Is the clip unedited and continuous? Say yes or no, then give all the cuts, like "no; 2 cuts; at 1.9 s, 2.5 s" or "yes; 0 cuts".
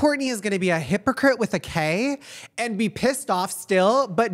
yes; 0 cuts